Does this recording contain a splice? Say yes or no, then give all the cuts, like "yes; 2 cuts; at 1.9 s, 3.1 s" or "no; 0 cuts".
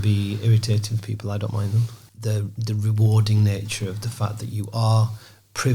yes; 1 cut; at 2.0 s